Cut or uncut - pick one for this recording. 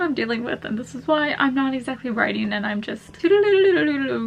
cut